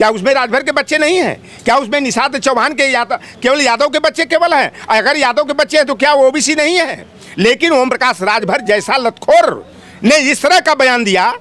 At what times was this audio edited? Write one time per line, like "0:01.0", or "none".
none